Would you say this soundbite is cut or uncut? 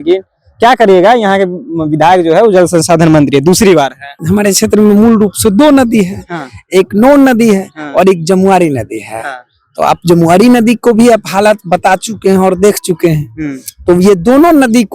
cut